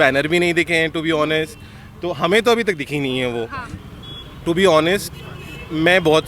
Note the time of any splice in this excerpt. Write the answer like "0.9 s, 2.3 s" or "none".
3.8 s